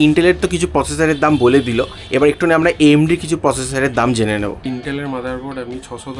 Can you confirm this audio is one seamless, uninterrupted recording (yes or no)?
no